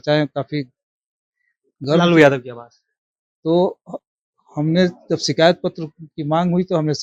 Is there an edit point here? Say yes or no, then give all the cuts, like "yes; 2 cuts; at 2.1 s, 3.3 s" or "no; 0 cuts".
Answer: no; 0 cuts